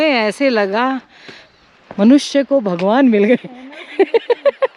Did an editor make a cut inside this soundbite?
no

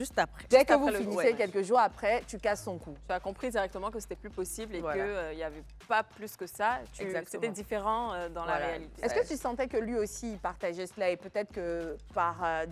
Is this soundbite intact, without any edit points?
yes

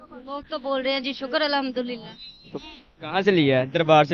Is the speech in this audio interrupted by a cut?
yes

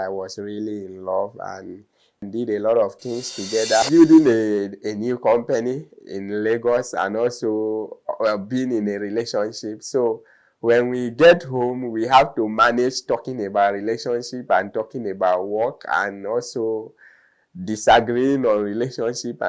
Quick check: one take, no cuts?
no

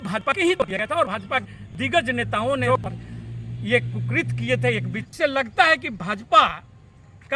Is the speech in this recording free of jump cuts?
no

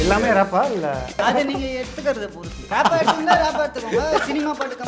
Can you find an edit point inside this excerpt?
yes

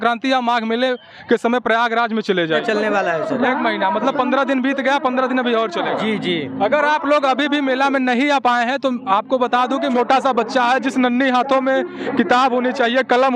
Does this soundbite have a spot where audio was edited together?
yes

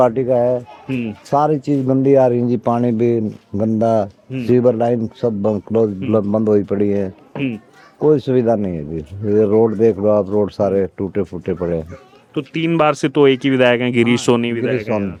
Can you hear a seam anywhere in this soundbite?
no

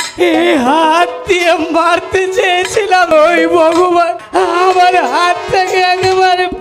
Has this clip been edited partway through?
yes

